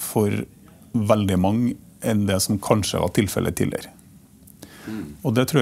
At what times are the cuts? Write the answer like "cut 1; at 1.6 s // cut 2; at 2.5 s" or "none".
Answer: none